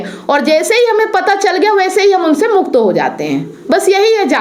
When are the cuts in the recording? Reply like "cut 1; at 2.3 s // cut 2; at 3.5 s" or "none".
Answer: none